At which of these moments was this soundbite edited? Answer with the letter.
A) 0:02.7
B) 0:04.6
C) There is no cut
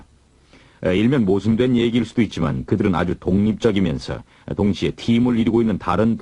A